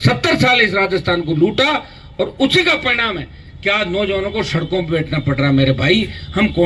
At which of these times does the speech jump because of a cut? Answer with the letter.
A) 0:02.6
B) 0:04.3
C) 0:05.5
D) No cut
D